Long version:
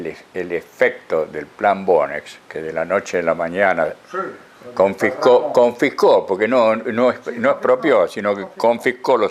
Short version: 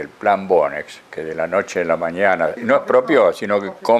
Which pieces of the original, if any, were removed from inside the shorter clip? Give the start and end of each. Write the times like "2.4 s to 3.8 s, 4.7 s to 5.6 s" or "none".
4.0 s to 7.3 s